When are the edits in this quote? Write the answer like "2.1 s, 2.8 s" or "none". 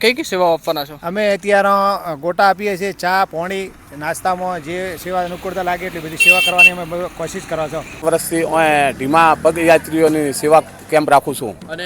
8.0 s